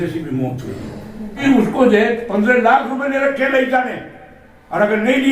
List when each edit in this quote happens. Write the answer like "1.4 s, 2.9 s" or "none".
1.4 s

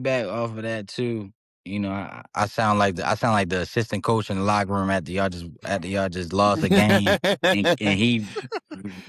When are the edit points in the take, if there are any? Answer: none

